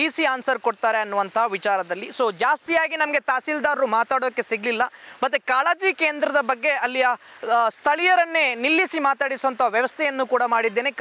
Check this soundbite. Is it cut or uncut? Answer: uncut